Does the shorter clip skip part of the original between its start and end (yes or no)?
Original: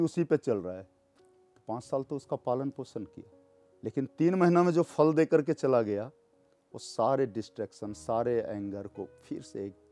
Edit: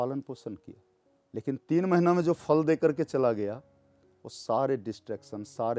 no